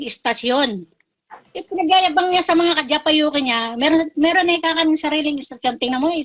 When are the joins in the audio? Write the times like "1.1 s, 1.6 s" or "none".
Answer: none